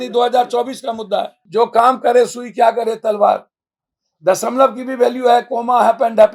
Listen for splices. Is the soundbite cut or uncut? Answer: cut